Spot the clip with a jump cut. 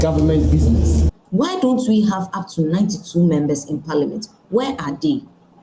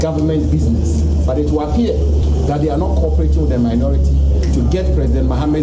first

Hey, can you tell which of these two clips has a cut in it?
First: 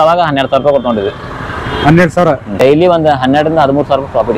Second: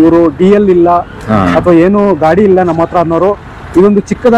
first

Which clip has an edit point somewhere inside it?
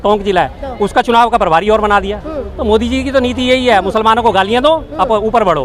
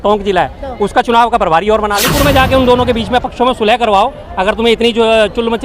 second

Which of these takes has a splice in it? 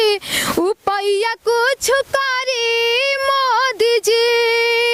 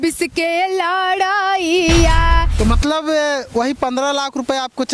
second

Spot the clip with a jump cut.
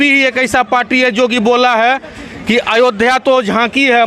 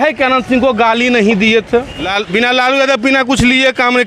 second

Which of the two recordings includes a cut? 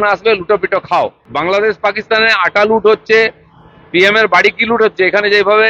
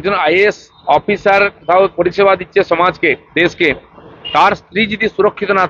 first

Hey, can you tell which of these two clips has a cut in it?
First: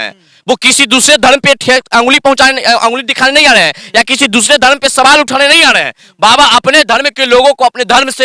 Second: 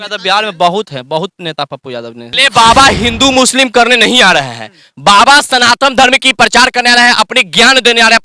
second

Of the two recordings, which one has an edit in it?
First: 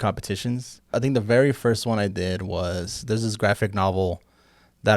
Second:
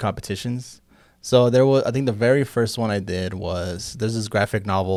first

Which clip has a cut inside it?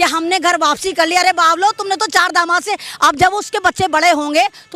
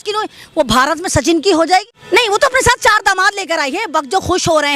second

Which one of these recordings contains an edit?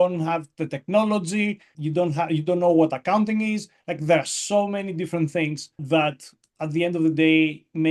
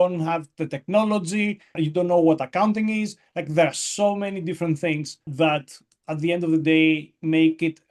second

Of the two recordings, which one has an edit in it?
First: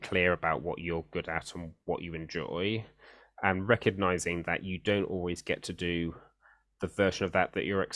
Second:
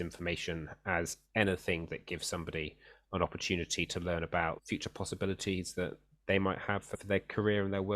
second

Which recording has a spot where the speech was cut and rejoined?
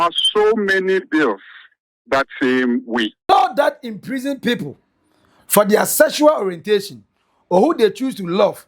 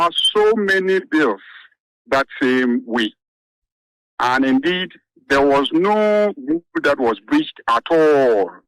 first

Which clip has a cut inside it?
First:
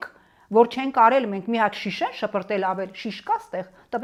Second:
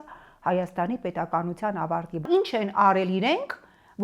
second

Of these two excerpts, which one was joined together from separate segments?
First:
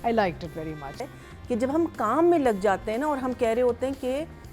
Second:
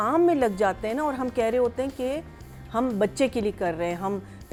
first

